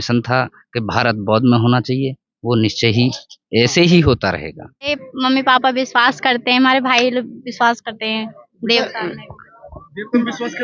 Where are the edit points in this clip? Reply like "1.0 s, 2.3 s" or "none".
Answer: 5.1 s